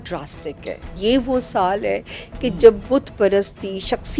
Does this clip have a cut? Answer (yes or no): yes